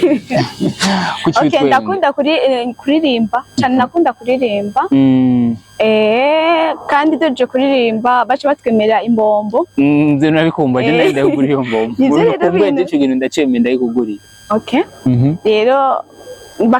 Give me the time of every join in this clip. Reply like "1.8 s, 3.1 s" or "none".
none